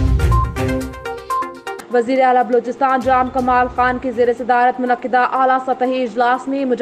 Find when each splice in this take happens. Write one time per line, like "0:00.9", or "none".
0:01.6